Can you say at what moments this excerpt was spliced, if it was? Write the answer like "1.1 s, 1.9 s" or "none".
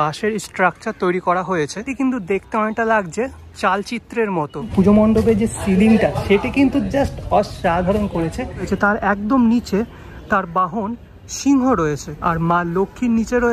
1.9 s, 4.7 s, 8.7 s, 12.1 s